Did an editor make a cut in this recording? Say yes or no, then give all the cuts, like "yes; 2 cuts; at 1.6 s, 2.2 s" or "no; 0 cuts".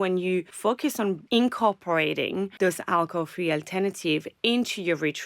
yes; 2 cuts; at 1.1 s, 2.5 s